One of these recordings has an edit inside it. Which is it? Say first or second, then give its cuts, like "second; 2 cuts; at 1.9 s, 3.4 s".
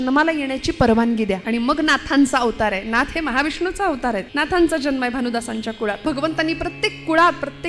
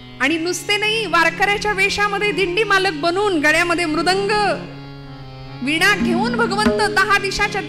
first; 3 cuts; at 1.4 s, 4.3 s, 6.0 s